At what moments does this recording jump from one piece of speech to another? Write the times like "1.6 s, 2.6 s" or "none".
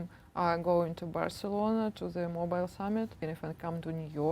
3.3 s